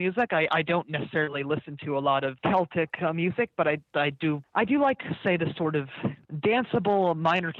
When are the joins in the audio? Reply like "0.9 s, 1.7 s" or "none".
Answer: 2.4 s, 4.4 s, 6.3 s